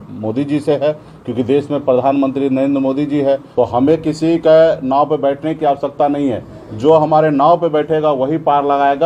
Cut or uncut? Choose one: cut